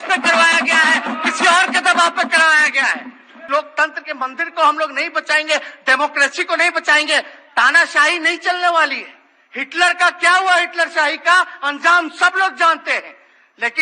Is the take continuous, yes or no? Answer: no